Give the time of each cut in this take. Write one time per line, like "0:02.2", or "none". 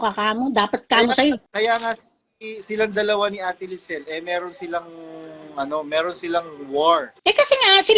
0:01.5